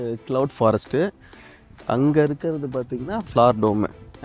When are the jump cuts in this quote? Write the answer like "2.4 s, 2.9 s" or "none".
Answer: none